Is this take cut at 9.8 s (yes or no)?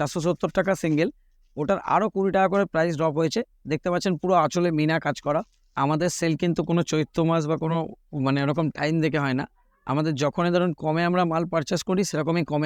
no